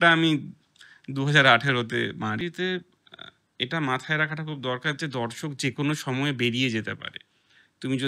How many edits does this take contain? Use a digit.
1